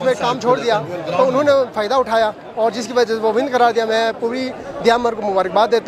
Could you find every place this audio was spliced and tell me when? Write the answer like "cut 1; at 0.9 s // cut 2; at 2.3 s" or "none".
none